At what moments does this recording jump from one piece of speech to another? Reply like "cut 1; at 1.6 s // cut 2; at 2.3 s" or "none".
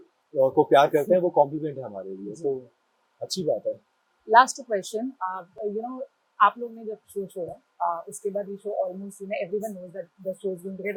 none